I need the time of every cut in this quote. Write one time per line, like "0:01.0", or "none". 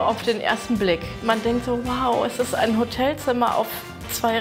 0:01.1